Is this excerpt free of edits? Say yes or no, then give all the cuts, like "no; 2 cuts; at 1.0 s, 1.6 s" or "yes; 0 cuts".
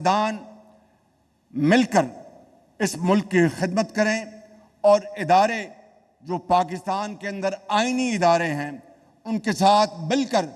yes; 0 cuts